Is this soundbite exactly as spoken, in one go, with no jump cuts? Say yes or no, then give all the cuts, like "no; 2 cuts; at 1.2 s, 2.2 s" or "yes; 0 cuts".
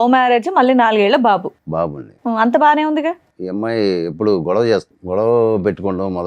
no; 2 cuts; at 3.3 s, 4.9 s